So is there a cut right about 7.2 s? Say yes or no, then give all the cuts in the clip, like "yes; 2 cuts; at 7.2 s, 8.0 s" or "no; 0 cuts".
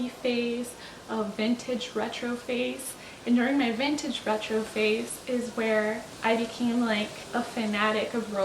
yes; 2 cuts; at 6.1 s, 7.2 s